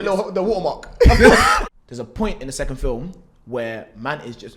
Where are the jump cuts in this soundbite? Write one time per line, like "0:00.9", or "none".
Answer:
0:01.5